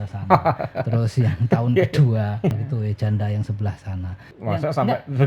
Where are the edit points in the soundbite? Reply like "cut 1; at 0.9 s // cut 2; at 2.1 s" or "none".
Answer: cut 1; at 2.5 s // cut 2; at 4.3 s